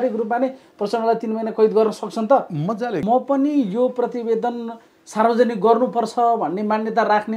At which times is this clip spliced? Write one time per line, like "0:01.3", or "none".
0:03.0